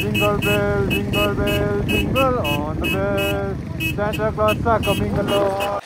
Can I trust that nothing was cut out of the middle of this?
yes; 0 cuts

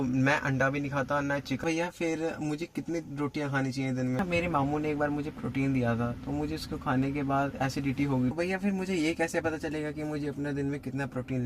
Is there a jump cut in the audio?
yes; 3 cuts; at 1.6 s, 4.2 s, 8.3 s

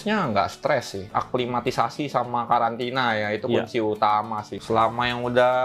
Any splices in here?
yes; 2 cuts; at 1.0 s, 4.5 s

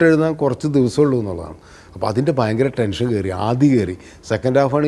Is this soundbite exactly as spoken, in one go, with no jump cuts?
yes; 0 cuts

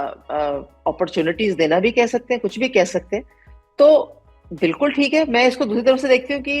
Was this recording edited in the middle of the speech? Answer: no; 0 cuts

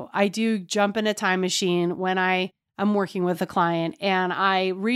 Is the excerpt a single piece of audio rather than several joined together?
yes; 0 cuts

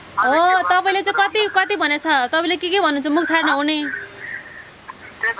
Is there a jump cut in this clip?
no; 0 cuts

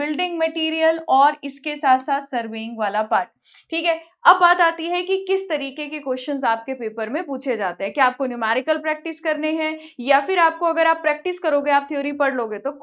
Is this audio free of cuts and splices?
yes; 0 cuts

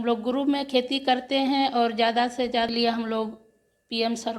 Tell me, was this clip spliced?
yes; 1 cut; at 2.7 s

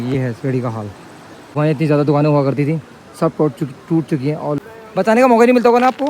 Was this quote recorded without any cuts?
no; 2 cuts; at 1.6 s, 4.6 s

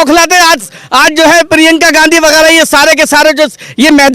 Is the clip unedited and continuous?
yes; 0 cuts

